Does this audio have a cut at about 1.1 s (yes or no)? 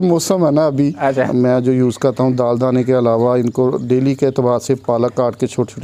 yes